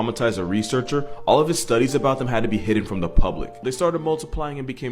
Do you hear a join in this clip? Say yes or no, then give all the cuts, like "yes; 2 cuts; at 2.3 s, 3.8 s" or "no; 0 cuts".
yes; 1 cut; at 3.6 s